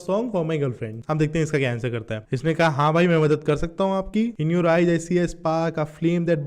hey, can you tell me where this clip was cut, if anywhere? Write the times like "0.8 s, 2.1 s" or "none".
0.9 s, 2.2 s, 4.3 s